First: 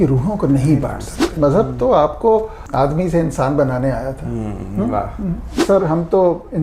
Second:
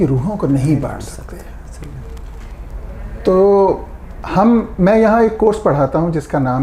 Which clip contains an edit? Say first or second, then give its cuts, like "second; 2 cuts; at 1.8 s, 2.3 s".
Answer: first; 3 cuts; at 1.3 s, 2.6 s, 5.6 s